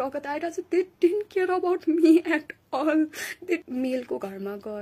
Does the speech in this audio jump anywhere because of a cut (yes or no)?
yes